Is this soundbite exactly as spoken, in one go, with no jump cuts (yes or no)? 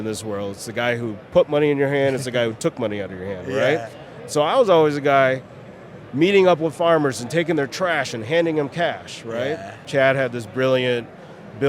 no